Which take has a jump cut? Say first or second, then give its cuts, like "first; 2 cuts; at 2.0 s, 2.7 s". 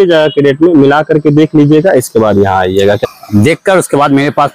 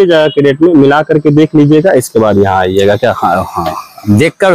first; 1 cut; at 3.0 s